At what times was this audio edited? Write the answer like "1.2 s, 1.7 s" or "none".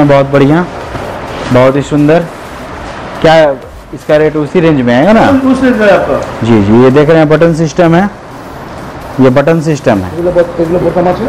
none